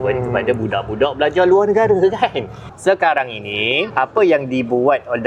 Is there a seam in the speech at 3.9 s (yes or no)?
yes